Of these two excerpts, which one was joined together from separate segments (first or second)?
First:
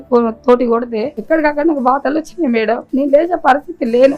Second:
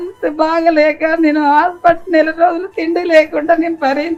first